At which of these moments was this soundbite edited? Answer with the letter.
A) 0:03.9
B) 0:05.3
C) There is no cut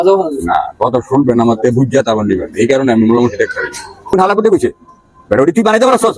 A